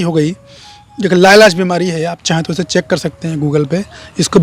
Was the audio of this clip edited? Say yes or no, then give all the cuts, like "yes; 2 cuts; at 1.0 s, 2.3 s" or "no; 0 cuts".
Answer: no; 0 cuts